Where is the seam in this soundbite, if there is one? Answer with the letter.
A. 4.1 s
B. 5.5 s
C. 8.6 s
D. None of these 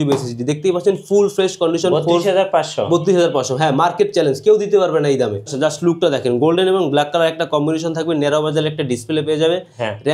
B